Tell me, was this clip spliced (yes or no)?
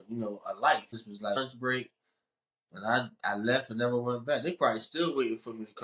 yes